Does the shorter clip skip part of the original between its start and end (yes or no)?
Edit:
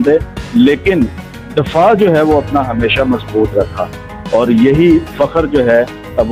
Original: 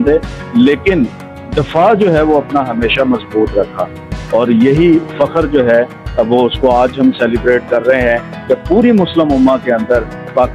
no